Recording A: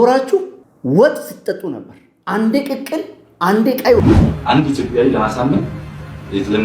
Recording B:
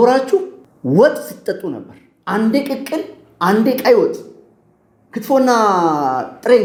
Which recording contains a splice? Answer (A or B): A